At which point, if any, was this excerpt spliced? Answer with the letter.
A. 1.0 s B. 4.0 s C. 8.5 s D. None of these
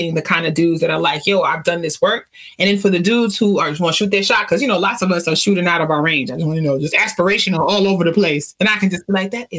C